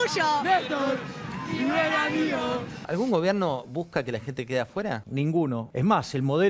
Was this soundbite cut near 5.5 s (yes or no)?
yes